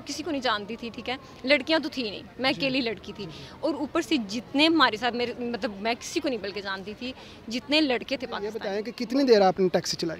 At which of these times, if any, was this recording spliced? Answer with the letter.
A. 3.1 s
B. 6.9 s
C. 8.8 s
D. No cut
C